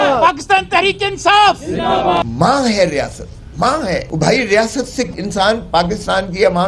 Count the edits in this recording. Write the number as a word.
three